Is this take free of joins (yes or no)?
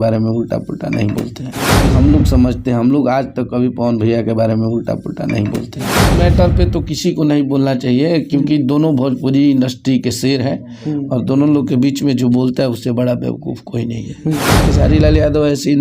no